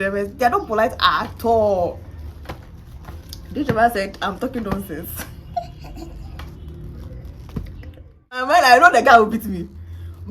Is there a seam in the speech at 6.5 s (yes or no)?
yes